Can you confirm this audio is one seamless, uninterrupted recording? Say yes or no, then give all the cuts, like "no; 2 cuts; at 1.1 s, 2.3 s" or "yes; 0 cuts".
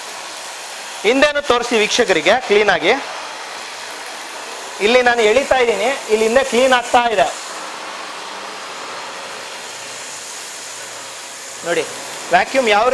yes; 0 cuts